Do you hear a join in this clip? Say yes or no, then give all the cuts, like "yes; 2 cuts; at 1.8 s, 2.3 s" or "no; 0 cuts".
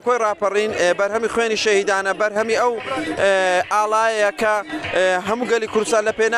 no; 0 cuts